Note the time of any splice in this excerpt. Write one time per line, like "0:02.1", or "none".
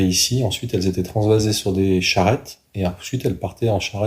0:02.6